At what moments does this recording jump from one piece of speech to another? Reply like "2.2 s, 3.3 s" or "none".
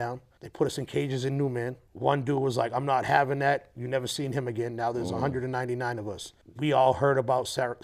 none

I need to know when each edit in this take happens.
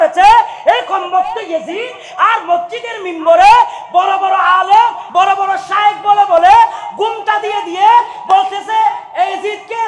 5.0 s

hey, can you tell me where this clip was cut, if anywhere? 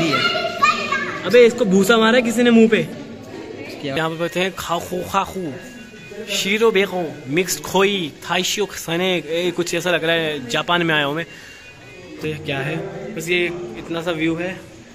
4.0 s, 12.2 s

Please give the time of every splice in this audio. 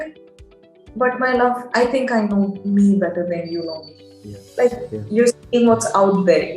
none

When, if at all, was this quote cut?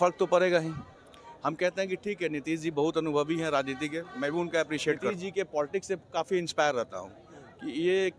5.1 s

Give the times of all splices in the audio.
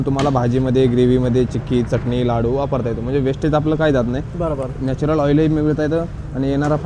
none

